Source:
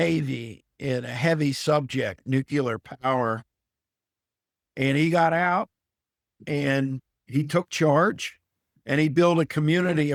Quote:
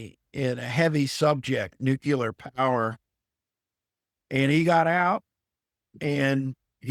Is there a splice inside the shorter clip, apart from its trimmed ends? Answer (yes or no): no